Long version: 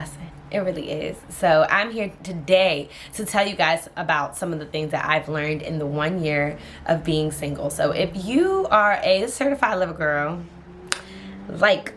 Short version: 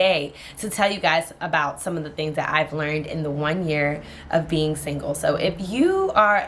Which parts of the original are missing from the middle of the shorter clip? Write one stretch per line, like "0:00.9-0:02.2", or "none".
none